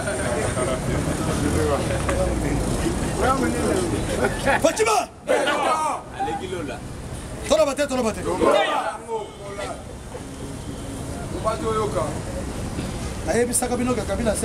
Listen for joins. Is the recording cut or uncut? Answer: uncut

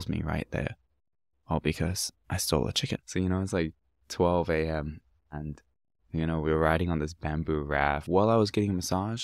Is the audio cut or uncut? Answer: cut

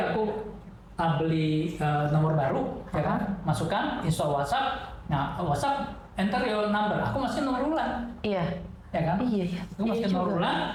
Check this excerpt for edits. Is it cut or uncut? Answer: uncut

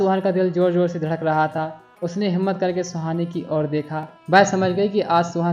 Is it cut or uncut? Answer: cut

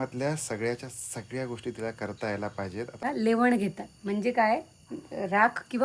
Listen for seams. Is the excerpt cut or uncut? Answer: cut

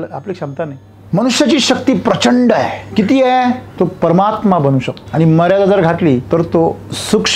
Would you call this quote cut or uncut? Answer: cut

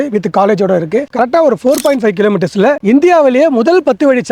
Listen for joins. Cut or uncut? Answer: cut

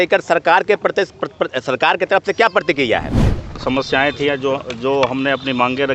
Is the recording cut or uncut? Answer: cut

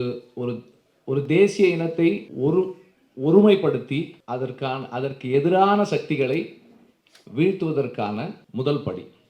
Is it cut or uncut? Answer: cut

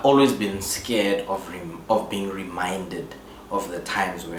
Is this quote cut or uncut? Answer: uncut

